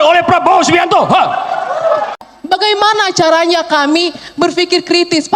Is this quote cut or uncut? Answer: cut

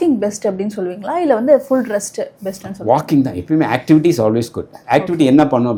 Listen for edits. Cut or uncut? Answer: uncut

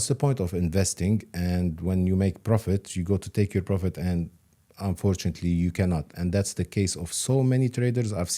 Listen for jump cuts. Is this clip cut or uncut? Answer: uncut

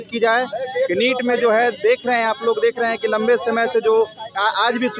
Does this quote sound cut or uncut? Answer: uncut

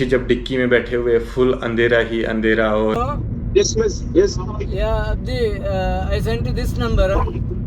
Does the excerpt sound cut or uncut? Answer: cut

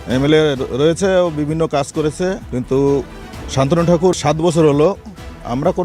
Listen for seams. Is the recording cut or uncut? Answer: cut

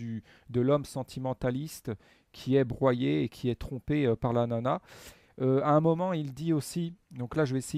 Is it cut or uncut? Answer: cut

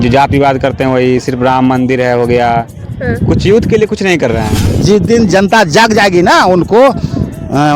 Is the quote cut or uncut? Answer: cut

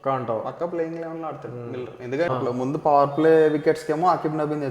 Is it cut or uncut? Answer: cut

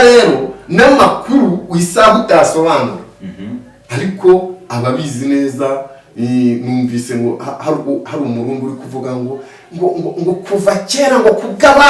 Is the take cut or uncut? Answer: uncut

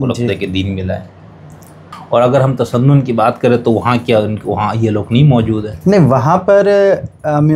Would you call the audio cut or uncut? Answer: cut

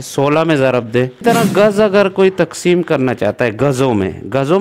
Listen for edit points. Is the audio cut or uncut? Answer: cut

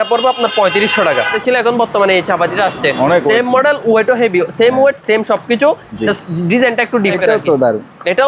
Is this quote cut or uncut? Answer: cut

